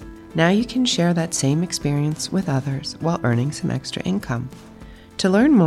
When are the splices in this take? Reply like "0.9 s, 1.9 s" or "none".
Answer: none